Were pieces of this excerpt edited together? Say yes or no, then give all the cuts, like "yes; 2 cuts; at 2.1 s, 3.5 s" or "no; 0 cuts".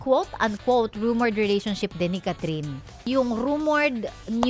yes; 1 cut; at 3.1 s